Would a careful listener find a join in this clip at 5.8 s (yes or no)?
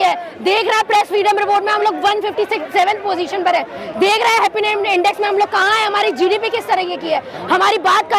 no